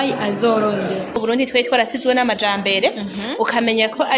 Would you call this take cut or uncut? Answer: cut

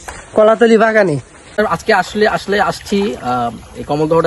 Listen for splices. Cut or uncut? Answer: cut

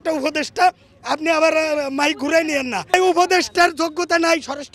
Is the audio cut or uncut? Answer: cut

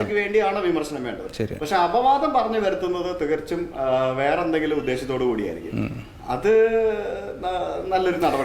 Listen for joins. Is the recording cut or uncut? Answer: uncut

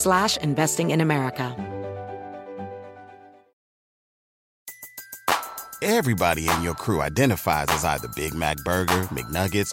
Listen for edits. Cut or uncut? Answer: cut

